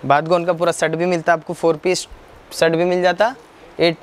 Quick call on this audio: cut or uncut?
uncut